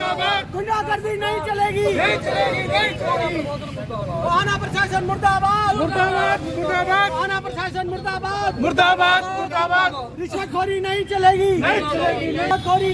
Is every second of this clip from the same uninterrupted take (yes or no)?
yes